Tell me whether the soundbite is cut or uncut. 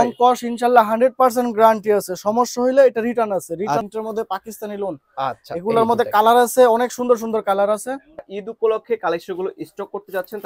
cut